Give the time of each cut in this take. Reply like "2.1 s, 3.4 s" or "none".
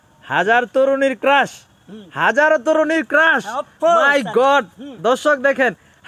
none